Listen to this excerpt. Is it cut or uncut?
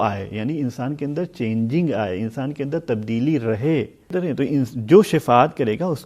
cut